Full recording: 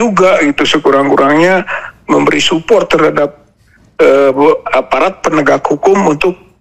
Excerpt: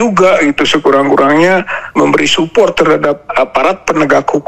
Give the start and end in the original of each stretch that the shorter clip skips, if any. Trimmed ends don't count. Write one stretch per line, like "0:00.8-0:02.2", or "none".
0:01.8-0:01.9
0:03.4-0:04.6